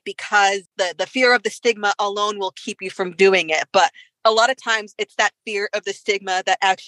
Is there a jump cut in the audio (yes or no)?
no